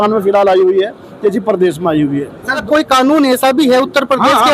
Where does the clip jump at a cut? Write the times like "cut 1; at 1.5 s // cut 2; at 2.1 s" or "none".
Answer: cut 1; at 2.6 s